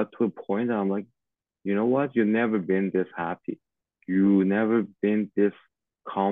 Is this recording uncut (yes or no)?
yes